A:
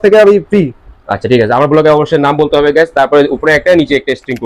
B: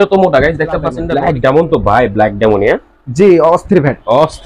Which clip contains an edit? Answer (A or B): B